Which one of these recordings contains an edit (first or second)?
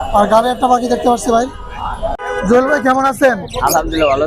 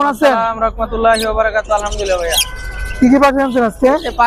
first